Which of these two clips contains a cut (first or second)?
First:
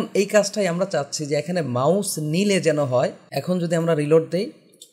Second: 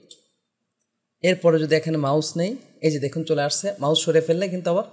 first